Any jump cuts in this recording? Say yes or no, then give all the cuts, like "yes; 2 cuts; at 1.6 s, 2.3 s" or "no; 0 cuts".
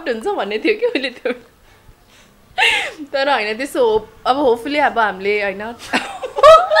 no; 0 cuts